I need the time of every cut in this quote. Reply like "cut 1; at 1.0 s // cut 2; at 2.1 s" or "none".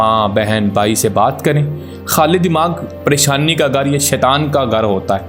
none